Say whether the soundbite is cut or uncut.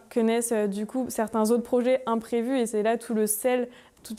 uncut